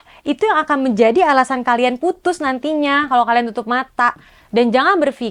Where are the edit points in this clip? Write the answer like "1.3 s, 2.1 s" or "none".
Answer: none